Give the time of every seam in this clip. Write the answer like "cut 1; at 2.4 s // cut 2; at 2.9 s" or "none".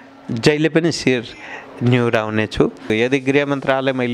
cut 1; at 2.9 s